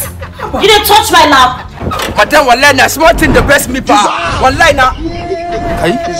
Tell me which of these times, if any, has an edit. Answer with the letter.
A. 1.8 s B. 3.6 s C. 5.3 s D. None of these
A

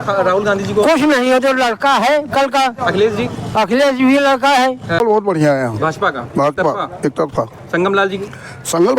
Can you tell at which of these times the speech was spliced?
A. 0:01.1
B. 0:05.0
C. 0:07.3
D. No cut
B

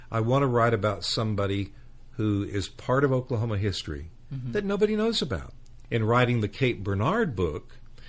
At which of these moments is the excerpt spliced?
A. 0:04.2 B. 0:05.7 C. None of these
B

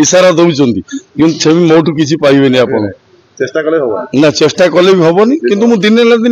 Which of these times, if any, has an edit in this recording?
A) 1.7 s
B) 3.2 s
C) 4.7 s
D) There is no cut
D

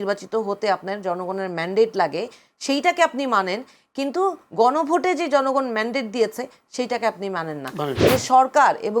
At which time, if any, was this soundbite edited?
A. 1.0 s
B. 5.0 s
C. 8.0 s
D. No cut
C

